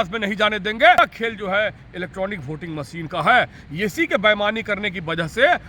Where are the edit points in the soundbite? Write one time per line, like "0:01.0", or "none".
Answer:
0:01.0